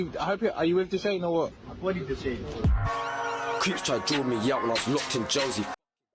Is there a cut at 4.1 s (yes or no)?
no